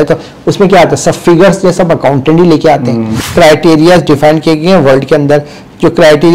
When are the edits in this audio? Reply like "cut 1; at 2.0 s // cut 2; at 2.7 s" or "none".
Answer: cut 1; at 3.2 s